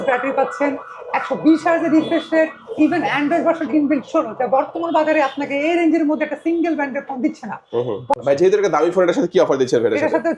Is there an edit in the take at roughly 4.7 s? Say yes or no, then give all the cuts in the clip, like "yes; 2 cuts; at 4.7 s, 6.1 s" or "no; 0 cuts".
no; 1 cut; at 8.1 s